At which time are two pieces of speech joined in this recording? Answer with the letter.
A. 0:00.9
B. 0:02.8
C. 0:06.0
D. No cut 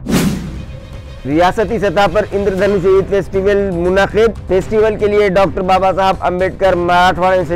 A